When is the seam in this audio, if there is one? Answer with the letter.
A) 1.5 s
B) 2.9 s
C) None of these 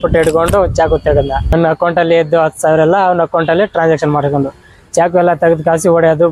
A